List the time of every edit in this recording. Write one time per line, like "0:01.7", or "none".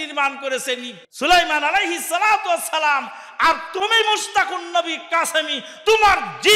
0:01.0

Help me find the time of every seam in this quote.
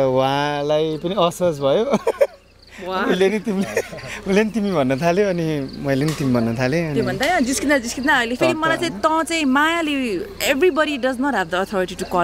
none

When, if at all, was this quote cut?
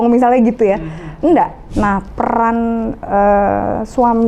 0:01.6

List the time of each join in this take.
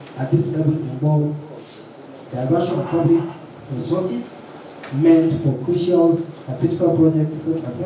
none

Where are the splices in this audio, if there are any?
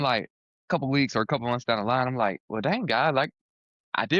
none

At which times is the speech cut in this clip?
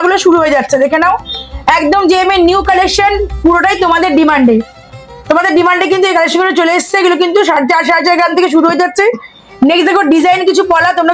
none

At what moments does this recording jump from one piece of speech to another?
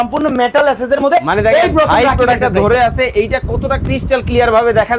none

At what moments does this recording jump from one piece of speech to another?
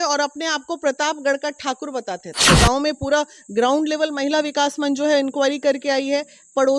0:02.4

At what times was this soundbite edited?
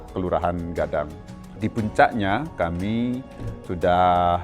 0:01.5

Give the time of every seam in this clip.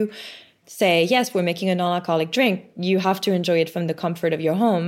none

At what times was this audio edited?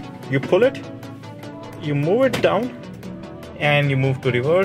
none

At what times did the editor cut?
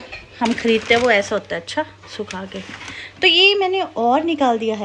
none

